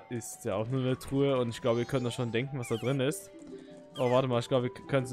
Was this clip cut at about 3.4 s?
no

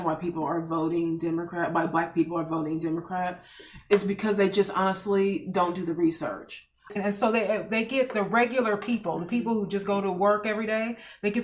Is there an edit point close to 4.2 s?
no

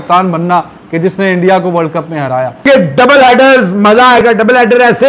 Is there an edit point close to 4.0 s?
no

